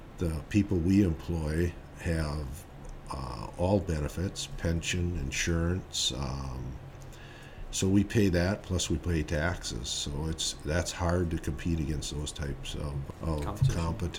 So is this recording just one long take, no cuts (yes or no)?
no